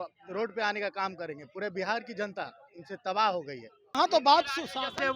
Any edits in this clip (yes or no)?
yes